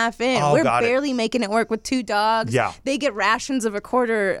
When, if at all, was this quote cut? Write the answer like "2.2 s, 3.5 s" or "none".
none